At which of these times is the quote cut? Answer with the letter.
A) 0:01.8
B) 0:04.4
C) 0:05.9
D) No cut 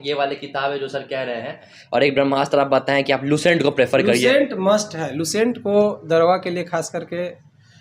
A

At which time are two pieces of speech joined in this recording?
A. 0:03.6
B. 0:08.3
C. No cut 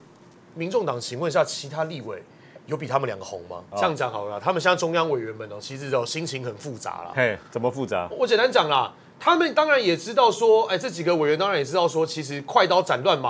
A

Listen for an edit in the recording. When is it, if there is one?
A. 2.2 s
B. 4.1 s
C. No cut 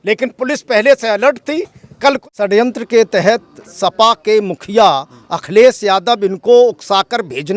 A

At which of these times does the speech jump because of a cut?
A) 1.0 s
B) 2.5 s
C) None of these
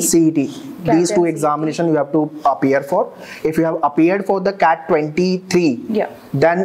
C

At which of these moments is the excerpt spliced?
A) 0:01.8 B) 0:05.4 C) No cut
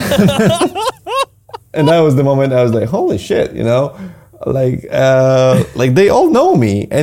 A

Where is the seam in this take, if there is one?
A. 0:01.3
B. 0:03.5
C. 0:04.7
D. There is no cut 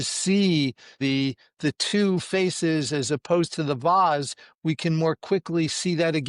A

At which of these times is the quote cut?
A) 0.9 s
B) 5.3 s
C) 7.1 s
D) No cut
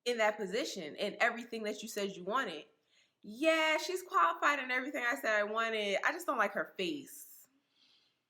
D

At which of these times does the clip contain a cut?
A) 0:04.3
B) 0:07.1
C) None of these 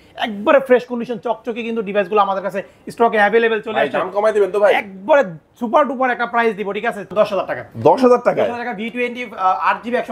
B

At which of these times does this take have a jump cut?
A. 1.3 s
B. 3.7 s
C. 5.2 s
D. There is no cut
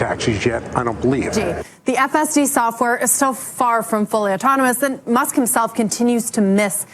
A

